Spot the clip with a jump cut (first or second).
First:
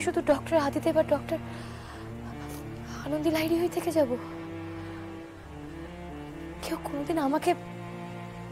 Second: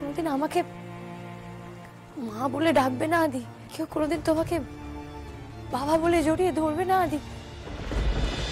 second